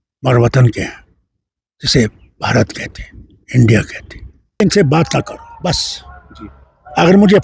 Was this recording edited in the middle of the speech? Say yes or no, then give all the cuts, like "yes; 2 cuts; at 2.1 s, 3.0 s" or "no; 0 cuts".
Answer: yes; 1 cut; at 4.6 s